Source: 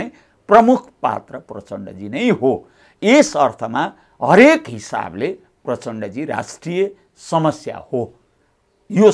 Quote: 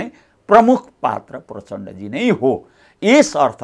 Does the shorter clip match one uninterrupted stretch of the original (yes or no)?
yes